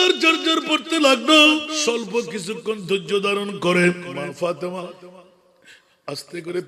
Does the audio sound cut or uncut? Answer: cut